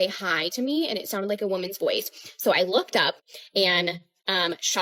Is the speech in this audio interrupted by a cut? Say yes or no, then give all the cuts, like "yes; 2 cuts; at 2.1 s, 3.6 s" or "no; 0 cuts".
no; 0 cuts